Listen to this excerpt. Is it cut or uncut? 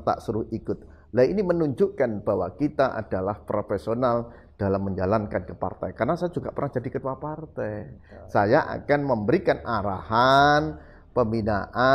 uncut